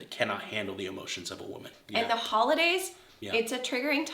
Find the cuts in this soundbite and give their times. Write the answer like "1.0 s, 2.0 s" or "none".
1.7 s